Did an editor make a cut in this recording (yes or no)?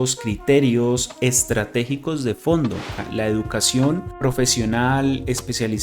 yes